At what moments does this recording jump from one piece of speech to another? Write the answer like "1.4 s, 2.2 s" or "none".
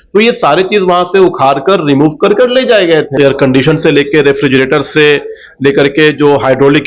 3.1 s